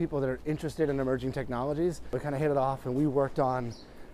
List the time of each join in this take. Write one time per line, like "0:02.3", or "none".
0:02.2